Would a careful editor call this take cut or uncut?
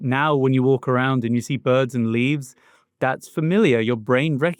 uncut